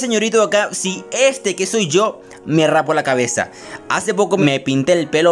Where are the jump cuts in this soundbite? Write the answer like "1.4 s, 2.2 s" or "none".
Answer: 4.4 s